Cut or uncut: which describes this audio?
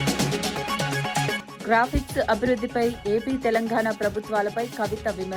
cut